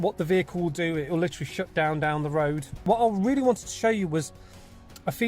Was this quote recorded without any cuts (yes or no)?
no